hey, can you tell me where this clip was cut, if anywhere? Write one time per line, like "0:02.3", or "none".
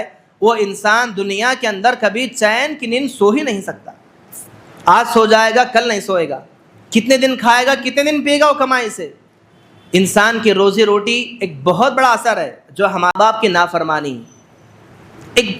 0:13.1